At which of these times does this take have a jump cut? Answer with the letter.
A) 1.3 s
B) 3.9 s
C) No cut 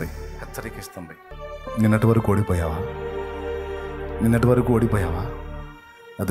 A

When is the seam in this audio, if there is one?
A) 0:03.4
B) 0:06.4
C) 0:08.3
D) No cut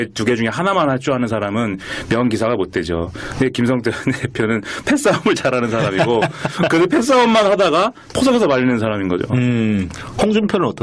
B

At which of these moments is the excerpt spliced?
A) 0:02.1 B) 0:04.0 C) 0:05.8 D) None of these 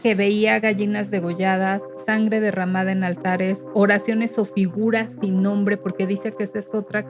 D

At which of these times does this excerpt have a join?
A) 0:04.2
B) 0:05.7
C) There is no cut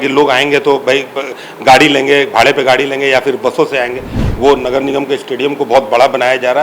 A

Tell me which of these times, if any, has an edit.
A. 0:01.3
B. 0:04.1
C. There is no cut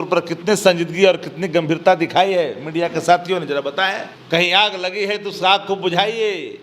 B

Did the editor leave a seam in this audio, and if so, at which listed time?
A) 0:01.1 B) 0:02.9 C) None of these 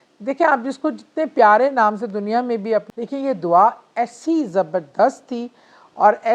B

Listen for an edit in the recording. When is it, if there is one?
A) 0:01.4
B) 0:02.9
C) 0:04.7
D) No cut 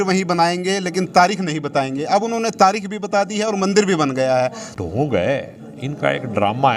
C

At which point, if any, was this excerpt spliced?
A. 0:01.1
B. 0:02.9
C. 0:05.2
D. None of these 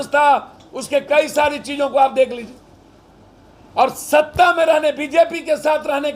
D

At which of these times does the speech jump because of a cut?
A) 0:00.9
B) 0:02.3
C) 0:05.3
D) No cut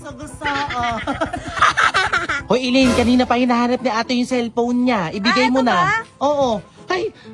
B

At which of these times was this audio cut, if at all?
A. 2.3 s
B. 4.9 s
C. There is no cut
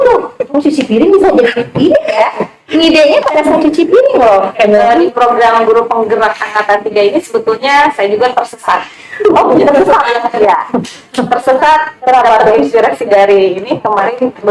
B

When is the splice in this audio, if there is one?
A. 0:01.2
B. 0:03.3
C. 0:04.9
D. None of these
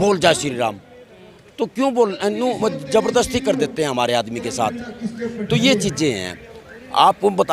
D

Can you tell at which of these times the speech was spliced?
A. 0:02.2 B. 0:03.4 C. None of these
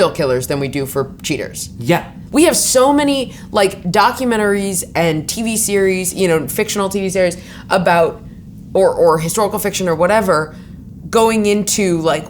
A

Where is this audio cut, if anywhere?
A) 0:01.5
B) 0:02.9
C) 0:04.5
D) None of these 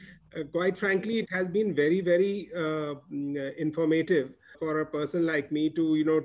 C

